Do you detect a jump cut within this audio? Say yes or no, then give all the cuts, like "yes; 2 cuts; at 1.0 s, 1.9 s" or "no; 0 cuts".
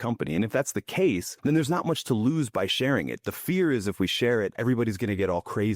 yes; 2 cuts; at 1.3 s, 4.5 s